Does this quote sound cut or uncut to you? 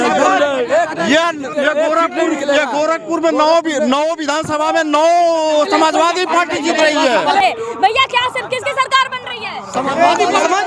cut